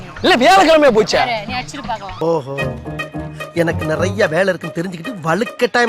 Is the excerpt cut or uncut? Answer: uncut